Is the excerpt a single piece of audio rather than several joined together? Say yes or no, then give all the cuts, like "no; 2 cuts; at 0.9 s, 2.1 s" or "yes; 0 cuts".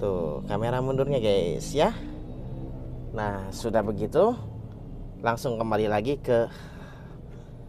yes; 0 cuts